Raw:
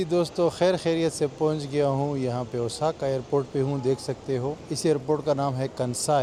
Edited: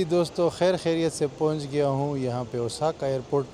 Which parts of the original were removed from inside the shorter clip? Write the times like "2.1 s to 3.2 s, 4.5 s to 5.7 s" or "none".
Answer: none